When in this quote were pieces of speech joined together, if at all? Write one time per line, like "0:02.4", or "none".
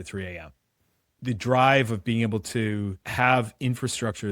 0:01.2
0:03.0